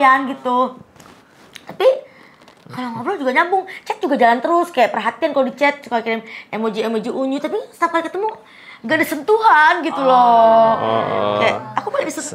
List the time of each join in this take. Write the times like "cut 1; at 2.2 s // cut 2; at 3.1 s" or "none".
none